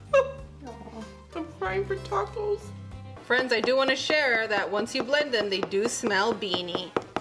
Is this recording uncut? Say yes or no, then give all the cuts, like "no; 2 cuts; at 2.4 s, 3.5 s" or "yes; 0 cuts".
no; 1 cut; at 3.1 s